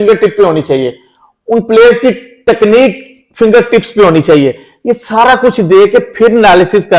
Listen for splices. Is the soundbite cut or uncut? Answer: uncut